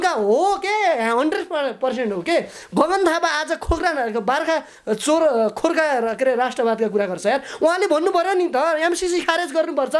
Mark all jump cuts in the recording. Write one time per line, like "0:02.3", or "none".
none